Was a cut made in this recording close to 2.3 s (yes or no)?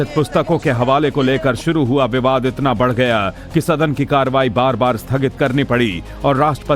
no